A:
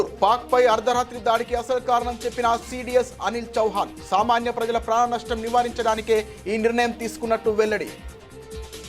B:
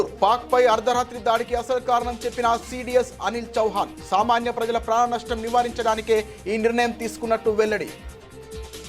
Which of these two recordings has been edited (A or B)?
B